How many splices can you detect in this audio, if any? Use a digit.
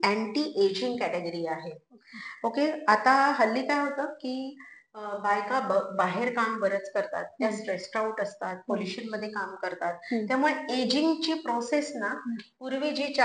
0